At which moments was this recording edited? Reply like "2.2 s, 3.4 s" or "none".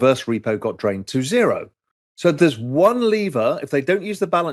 1.8 s